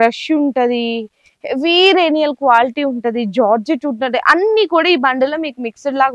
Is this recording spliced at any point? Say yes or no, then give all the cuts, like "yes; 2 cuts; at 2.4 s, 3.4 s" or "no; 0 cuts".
no; 0 cuts